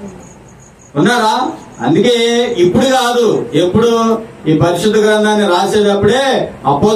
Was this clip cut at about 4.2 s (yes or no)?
no